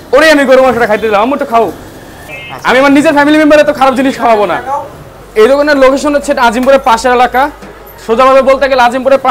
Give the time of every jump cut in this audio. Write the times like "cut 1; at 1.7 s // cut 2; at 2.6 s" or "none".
none

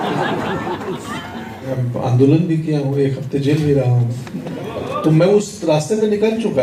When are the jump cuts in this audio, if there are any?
cut 1; at 1.7 s

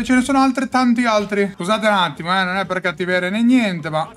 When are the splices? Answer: cut 1; at 1.6 s

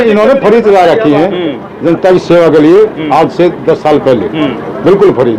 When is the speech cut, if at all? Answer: none

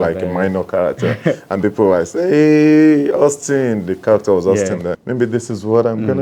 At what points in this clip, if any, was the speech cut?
cut 1; at 4.9 s

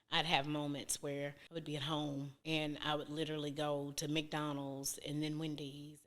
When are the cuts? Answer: cut 1; at 1.4 s // cut 2; at 2.3 s

